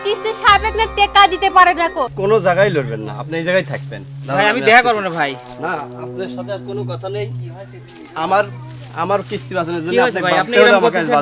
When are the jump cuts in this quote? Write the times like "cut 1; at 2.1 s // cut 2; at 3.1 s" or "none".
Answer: cut 1; at 2.1 s